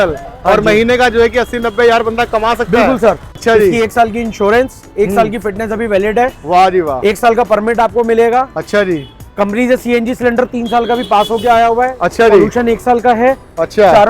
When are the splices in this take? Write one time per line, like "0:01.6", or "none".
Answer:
0:03.3